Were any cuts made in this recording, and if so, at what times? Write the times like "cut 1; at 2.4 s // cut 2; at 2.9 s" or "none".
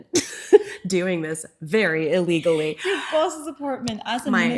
none